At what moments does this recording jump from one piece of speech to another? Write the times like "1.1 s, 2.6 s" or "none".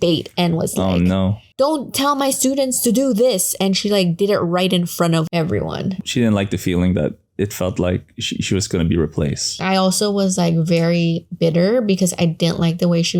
6.0 s, 9.6 s